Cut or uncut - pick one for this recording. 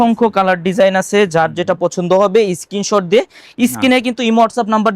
uncut